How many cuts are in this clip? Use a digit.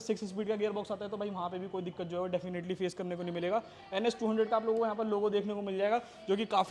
0